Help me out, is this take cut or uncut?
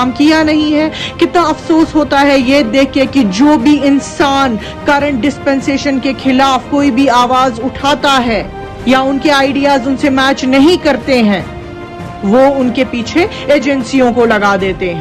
uncut